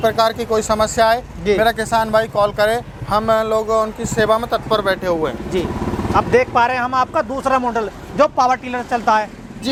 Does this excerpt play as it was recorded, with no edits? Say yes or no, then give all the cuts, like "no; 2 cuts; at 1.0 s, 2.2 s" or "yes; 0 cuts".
yes; 0 cuts